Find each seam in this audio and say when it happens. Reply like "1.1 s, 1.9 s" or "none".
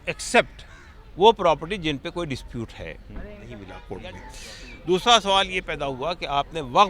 3.8 s

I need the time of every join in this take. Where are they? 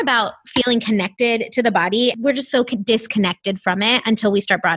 2.2 s

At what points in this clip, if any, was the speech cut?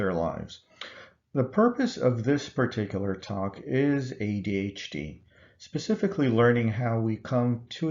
5.8 s

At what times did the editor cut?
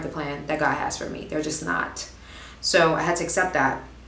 none

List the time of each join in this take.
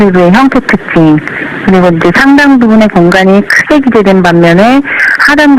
3.3 s

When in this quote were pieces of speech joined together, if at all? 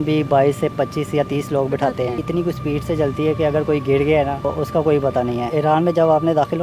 2.2 s, 4.5 s, 5.5 s

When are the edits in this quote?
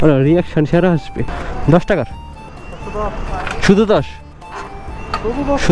1.3 s

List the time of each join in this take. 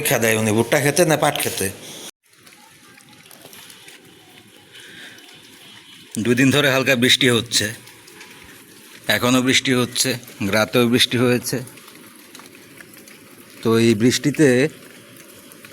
2.1 s

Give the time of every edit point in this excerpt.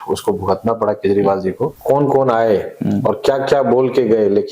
1.7 s

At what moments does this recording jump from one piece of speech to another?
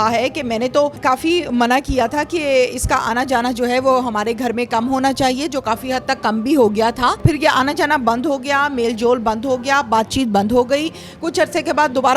1.0 s, 7.2 s

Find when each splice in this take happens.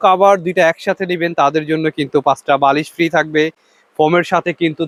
none

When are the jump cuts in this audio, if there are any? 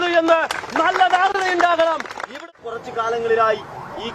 2.3 s

